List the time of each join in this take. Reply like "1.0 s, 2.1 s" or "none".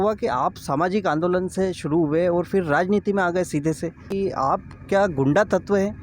4.1 s